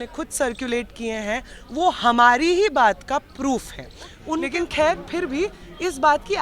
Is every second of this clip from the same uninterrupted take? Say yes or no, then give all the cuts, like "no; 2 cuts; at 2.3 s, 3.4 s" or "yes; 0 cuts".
no; 1 cut; at 4.2 s